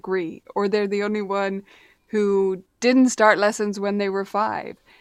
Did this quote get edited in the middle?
no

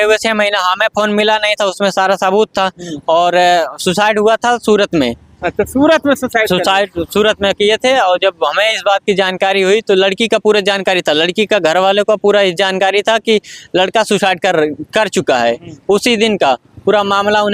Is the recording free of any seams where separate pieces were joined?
yes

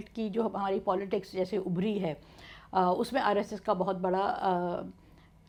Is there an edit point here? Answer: no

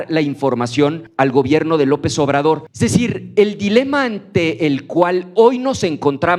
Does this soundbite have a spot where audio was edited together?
yes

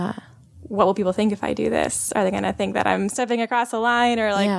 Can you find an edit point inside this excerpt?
no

